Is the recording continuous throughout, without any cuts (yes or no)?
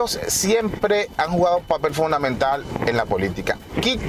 no